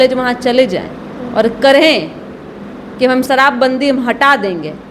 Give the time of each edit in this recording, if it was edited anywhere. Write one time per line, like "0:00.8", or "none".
0:03.2